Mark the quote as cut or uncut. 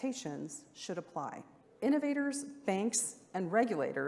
cut